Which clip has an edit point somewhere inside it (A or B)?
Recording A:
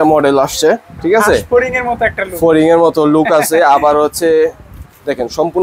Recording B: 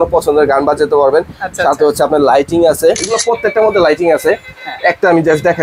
B